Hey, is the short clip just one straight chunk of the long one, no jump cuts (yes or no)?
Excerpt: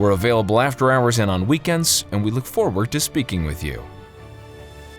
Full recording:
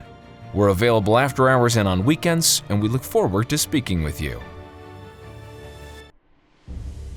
no